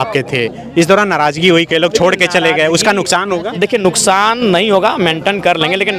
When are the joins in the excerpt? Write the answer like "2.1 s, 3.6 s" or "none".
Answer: none